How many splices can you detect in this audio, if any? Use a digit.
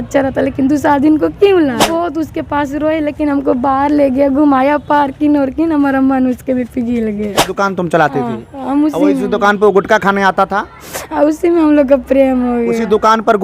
2